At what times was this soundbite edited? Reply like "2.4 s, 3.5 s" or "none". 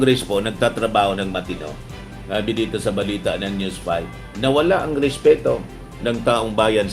none